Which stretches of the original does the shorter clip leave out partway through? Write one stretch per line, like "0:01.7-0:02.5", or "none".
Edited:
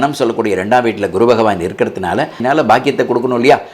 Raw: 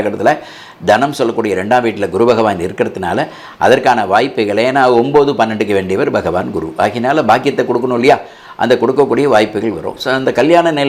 0:03.4-0:07.0